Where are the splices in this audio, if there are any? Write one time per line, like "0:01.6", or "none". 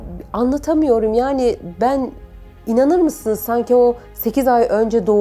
none